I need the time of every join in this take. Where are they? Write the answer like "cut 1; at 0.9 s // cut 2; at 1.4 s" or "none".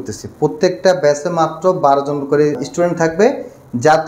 cut 1; at 2.6 s